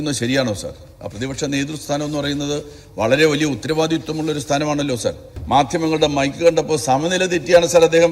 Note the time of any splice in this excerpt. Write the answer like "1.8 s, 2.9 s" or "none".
5.3 s